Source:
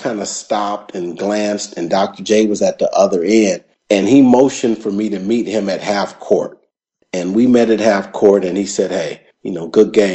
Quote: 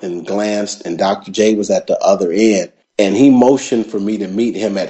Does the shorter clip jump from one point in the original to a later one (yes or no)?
no